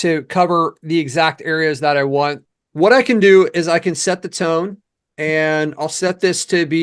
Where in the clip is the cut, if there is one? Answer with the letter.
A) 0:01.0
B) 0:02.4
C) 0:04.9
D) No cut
B